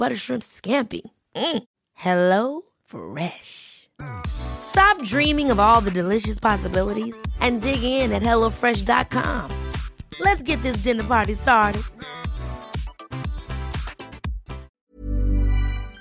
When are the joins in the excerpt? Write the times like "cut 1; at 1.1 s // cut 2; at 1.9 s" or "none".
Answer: cut 1; at 14.7 s